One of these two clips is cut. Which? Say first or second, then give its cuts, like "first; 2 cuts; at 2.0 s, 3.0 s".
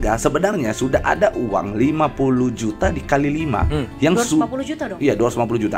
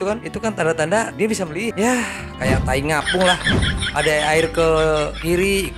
second; 1 cut; at 1.7 s